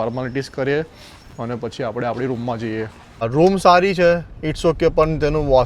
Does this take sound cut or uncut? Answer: cut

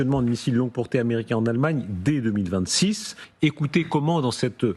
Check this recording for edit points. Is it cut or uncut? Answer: cut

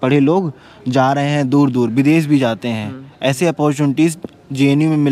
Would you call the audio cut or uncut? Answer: uncut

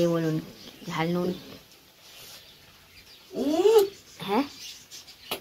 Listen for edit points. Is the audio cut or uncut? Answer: uncut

